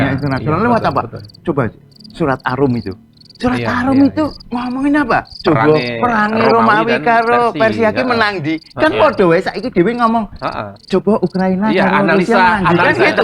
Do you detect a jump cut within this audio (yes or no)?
yes